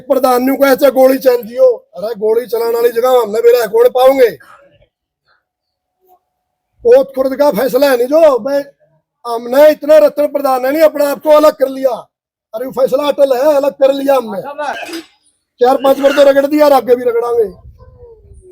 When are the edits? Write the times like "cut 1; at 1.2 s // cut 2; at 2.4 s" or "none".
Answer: cut 1; at 14.8 s